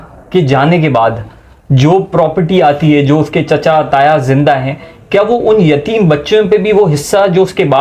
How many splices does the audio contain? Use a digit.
0